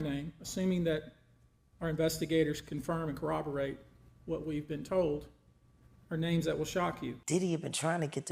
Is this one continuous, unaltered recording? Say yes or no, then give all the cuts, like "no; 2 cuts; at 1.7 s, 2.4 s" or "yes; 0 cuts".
no; 1 cut; at 7.2 s